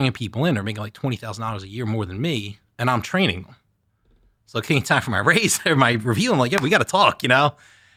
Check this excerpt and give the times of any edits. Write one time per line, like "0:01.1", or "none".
none